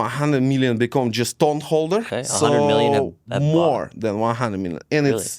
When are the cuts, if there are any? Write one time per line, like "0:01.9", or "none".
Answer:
0:02.2